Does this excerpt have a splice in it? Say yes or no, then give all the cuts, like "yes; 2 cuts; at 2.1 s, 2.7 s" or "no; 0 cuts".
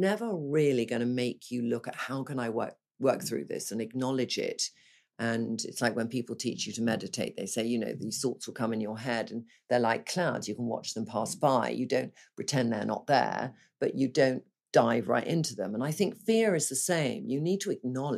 no; 0 cuts